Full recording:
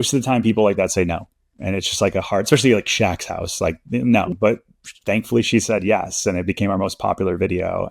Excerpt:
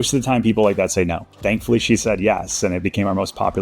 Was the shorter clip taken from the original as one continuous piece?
no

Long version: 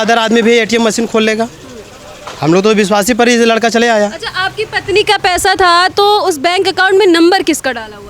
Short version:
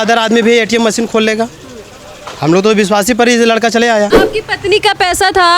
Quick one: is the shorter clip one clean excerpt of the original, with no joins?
no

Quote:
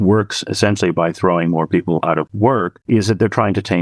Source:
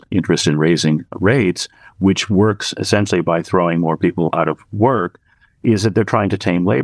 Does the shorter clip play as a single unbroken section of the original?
no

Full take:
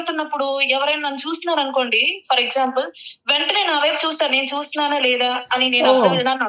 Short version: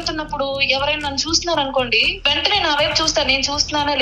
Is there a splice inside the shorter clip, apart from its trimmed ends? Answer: yes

